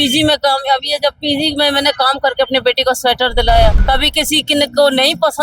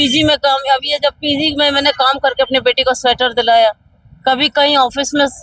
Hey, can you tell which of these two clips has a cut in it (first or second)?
first